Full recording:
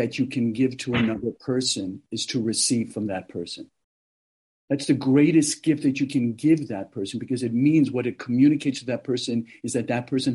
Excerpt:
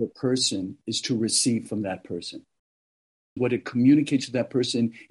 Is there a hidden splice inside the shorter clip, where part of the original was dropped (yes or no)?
yes